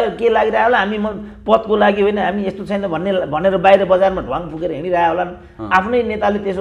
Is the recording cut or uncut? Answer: uncut